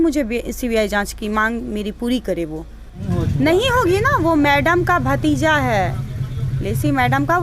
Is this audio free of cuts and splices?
no; 1 cut; at 3.1 s

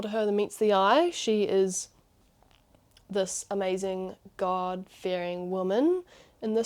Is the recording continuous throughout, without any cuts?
yes; 0 cuts

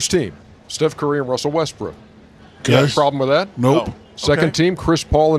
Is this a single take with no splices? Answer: yes; 0 cuts

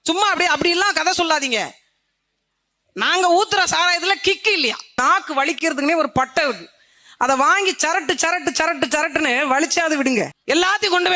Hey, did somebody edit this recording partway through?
yes; 2 cuts; at 5.0 s, 10.4 s

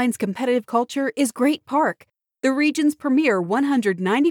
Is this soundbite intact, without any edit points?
yes; 0 cuts

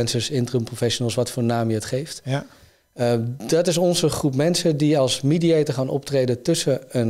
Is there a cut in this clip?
no; 0 cuts

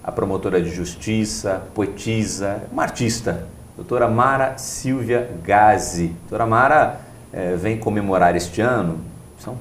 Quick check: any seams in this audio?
yes; 1 cut; at 2.8 s

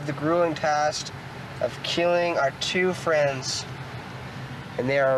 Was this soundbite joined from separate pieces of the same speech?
no; 0 cuts

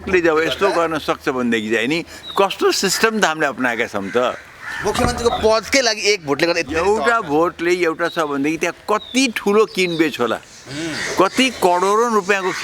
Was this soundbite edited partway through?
no; 0 cuts

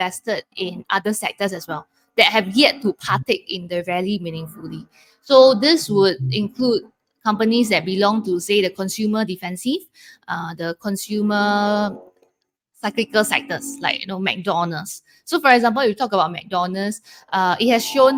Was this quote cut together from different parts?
no; 0 cuts

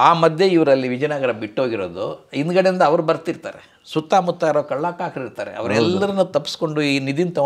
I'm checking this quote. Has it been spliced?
no; 0 cuts

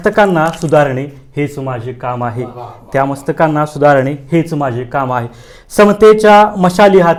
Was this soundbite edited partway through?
no; 0 cuts

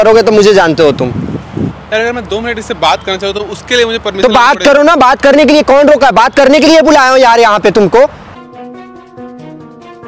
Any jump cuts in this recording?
yes; 2 cuts; at 1.8 s, 8.3 s

